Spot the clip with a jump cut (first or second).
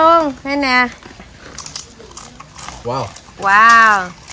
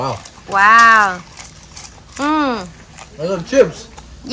first